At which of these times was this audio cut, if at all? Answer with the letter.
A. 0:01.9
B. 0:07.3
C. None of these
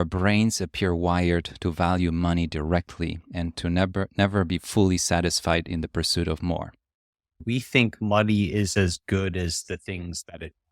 B